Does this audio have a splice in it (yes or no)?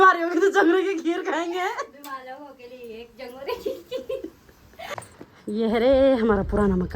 yes